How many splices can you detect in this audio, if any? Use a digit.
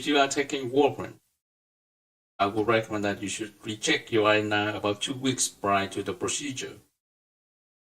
1